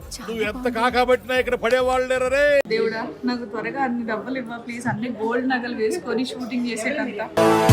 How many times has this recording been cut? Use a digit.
1